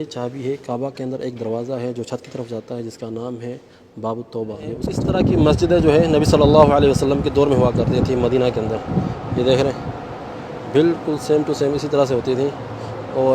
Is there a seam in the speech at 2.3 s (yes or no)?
no